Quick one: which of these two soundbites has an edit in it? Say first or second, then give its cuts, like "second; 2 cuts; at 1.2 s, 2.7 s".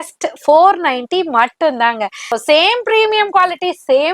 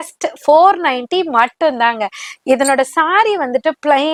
first; 1 cut; at 2.4 s